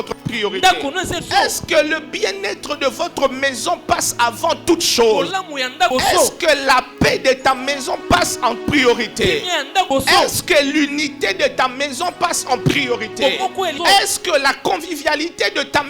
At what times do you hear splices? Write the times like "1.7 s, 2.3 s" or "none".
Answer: 1.2 s, 5.9 s, 9.9 s, 13.8 s